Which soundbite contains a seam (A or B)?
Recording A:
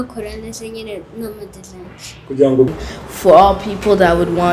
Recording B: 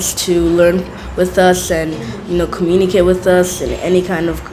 A